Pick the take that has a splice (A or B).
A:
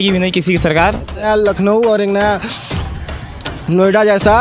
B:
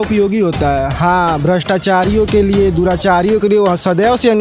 A